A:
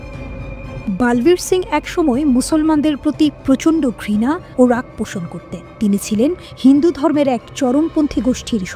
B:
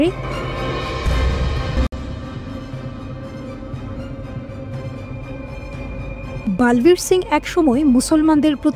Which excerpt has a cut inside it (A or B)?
B